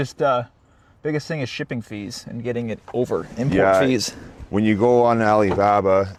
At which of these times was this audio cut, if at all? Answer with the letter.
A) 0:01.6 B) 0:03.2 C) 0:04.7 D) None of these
D